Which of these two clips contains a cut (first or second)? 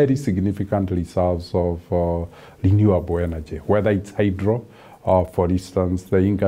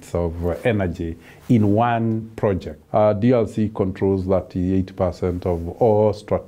second